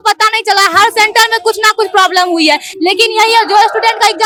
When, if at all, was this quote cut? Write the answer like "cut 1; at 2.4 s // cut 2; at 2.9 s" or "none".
none